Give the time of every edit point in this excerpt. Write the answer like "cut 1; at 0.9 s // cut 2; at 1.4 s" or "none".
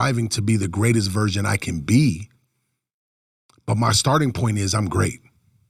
none